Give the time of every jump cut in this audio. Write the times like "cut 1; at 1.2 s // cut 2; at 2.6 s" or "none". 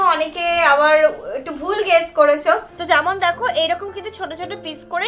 cut 1; at 2.7 s